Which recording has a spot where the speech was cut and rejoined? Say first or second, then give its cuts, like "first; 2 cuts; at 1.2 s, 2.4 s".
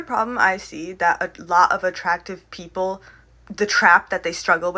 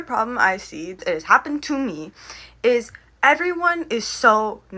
second; 1 cut; at 1.0 s